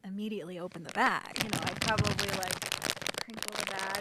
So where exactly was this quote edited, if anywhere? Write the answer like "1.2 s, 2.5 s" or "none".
1.3 s